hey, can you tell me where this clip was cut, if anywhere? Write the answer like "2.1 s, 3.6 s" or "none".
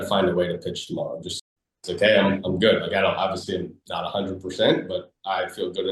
1.3 s